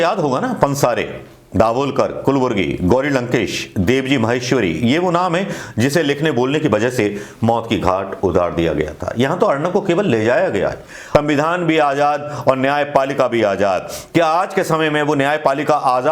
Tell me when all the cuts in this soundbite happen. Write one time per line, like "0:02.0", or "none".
0:10.9